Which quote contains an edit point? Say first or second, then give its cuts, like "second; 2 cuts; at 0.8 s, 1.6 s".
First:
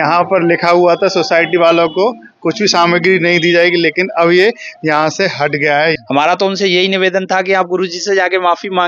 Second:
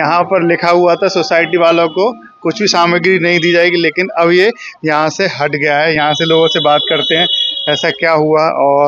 first; 1 cut; at 6.0 s